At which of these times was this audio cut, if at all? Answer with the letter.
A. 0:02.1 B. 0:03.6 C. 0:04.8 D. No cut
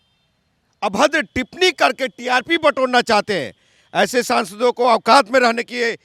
D